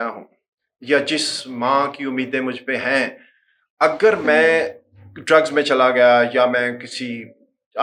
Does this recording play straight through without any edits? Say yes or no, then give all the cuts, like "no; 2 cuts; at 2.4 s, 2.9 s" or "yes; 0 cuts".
yes; 0 cuts